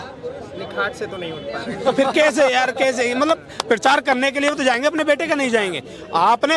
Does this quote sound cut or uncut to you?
uncut